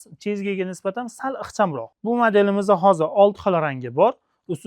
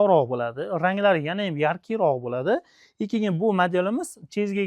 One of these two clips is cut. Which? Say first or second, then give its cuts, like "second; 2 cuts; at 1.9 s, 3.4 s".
first; 1 cut; at 1.9 s